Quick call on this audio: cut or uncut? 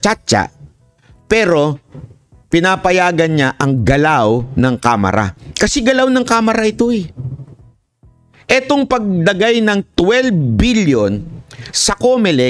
uncut